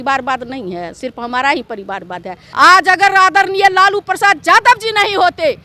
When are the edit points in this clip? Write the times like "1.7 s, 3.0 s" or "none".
2.4 s

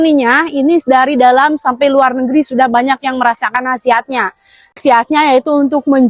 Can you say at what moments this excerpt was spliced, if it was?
4.8 s

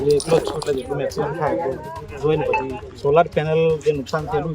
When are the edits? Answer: 2.8 s

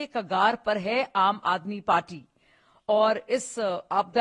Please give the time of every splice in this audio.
none

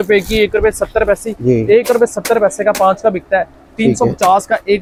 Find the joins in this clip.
none

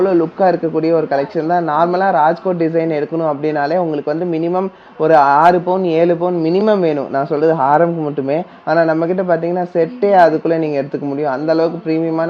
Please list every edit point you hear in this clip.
none

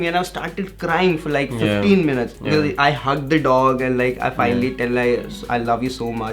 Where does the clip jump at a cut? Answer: 2.4 s

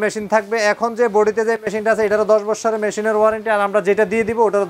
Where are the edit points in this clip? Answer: none

